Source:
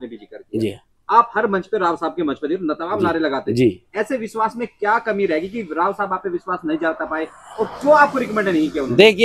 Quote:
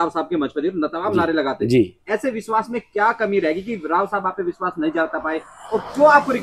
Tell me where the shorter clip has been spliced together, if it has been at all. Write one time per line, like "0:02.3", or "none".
none